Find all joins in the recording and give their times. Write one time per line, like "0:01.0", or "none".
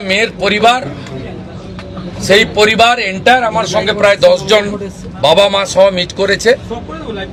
none